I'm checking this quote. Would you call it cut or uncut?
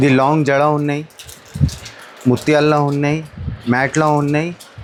uncut